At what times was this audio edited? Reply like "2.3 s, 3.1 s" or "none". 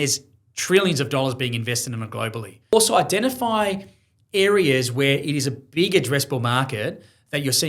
2.7 s